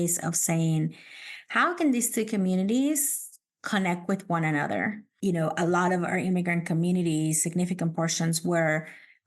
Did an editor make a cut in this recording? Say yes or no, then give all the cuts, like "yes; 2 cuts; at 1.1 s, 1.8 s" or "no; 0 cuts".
yes; 1 cut; at 5.1 s